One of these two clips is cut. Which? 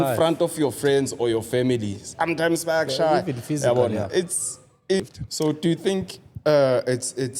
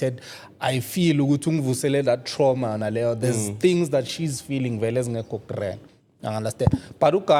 first; 1 cut; at 5.0 s

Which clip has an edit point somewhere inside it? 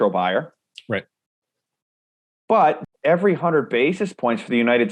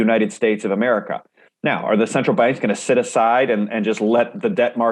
first; 1 cut; at 2.8 s

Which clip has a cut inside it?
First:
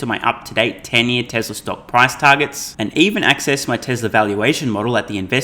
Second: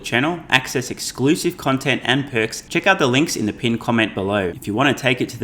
second; 2 cuts; at 2.6 s, 4.6 s

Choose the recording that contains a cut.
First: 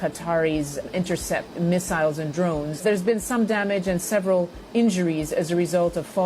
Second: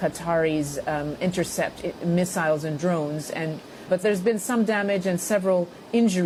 first; 2 cuts; at 1.2 s, 2.8 s

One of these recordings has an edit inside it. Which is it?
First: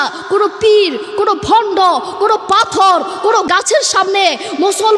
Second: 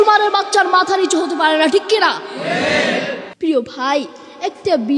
second; 1 cut; at 3.3 s

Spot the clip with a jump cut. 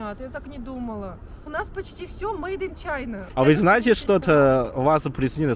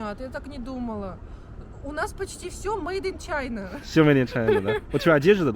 first; 2 cuts; at 1.3 s, 3.2 s

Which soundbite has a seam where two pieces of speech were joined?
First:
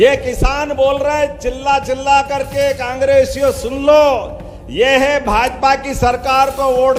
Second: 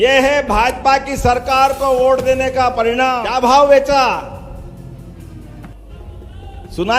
second; 1 cut; at 3.2 s

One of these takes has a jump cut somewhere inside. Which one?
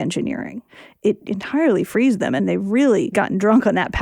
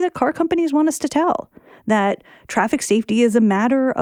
first; 3 cuts; at 1.1 s, 2.4 s, 3.1 s

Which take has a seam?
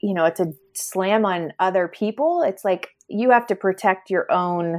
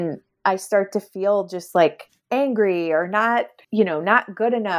second; 2 cuts; at 2.1 s, 3.6 s

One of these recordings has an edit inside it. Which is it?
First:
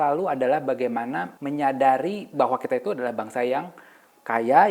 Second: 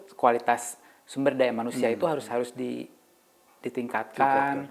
first; 1 cut; at 1.3 s

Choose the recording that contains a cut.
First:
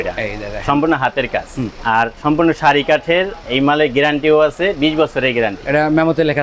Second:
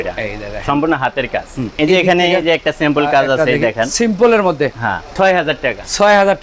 second; 2 cuts; at 1.7 s, 5.1 s

